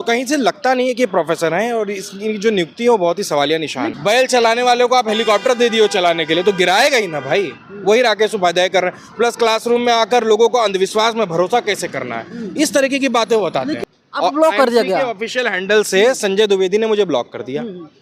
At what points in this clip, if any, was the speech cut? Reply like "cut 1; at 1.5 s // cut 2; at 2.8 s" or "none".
cut 1; at 3.9 s // cut 2; at 13.8 s

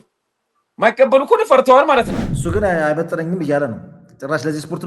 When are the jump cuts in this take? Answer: cut 1; at 2.2 s

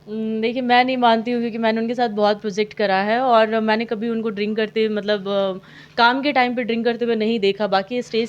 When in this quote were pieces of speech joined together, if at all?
none

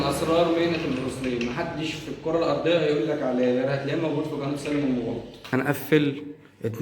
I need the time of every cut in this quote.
cut 1; at 5.5 s

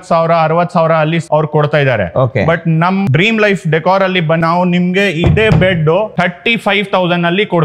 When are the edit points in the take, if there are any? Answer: cut 1; at 1.2 s // cut 2; at 3.1 s // cut 3; at 4.4 s // cut 4; at 6.1 s

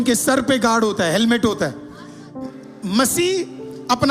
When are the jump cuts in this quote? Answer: cut 1; at 2.4 s

